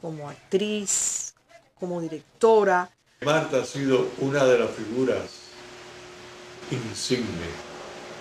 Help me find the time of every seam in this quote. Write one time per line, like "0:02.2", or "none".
none